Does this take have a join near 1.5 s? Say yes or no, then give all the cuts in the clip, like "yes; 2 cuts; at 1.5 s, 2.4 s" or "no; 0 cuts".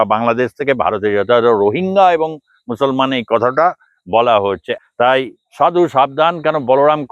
no; 1 cut; at 4.8 s